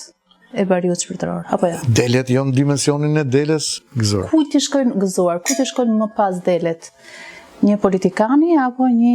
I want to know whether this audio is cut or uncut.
cut